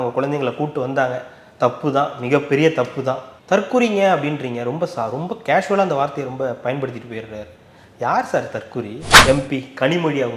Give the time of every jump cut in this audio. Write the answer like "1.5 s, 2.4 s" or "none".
9.0 s